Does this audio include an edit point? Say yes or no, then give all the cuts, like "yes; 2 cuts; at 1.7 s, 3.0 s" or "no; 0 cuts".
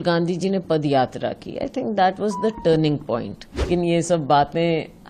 yes; 1 cut; at 3.7 s